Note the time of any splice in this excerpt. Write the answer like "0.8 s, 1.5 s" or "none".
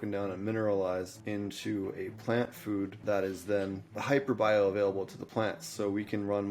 1.2 s, 3.0 s, 3.9 s

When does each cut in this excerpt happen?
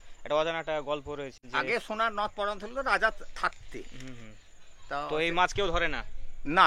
1.4 s

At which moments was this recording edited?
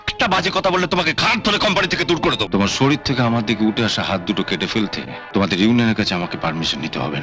2.4 s, 5.2 s

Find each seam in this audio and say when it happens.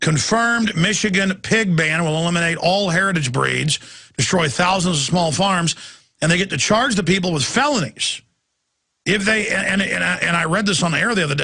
none

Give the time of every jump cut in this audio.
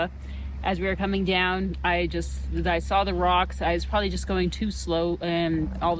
none

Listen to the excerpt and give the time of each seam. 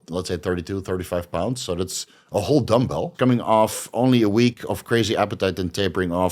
3.1 s

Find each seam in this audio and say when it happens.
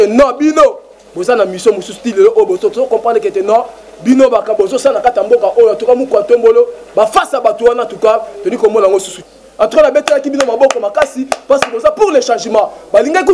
9.2 s

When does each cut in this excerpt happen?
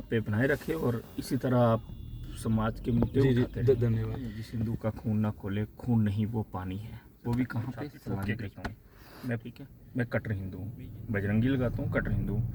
4.5 s, 8.6 s

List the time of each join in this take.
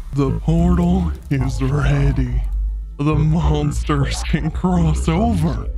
none

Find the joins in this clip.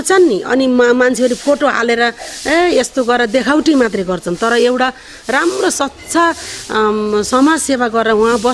none

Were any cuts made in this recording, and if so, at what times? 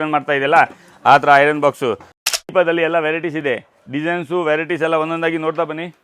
2.2 s

